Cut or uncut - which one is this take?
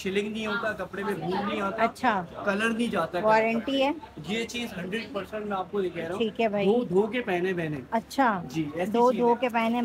uncut